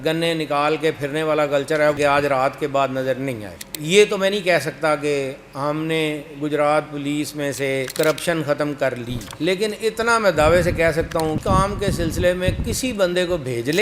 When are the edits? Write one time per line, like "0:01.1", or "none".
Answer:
0:02.0
0:03.7
0:11.4